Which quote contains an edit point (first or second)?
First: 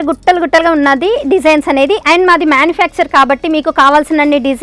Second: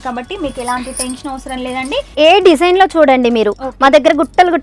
second